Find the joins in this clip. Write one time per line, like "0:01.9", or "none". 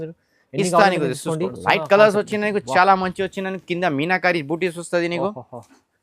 0:01.6